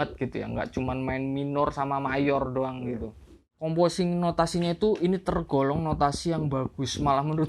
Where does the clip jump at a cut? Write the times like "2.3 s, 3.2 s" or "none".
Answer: 3.6 s